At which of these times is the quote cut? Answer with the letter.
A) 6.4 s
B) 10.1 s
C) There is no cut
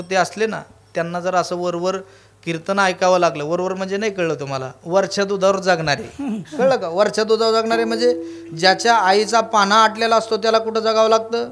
A